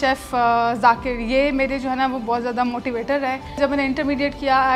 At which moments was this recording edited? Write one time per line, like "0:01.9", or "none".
0:03.6